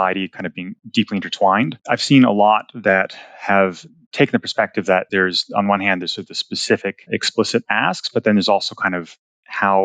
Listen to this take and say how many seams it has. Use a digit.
1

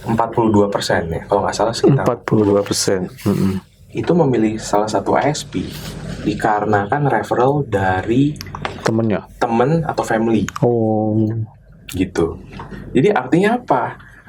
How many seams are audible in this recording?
0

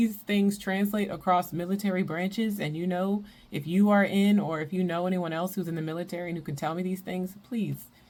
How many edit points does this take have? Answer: 0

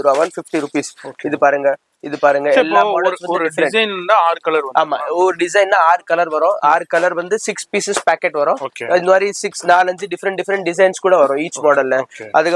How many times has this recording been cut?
0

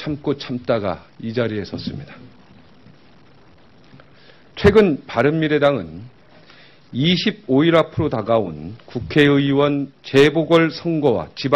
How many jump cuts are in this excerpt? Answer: 1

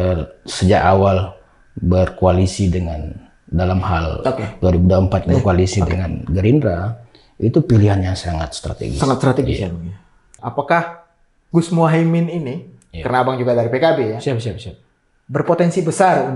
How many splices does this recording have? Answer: 1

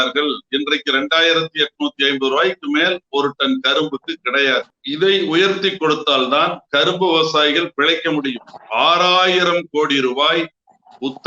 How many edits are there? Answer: 1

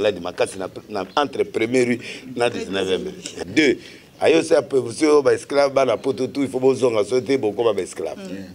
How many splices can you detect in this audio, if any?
1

